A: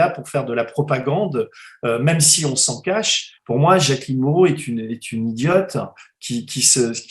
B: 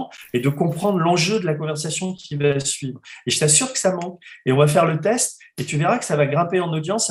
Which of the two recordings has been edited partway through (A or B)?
A